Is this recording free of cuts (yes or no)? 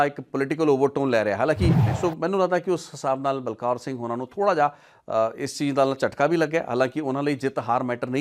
no